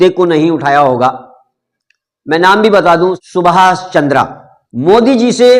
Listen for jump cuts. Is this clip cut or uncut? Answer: cut